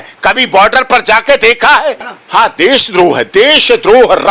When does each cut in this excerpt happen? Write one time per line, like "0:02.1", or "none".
0:02.0